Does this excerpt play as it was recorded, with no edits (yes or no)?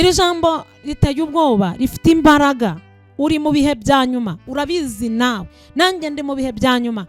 yes